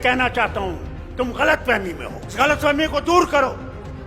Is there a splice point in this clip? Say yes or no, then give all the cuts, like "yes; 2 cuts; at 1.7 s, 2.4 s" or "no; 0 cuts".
yes; 1 cut; at 2.3 s